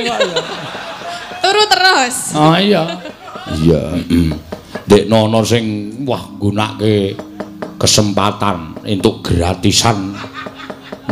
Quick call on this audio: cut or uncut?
cut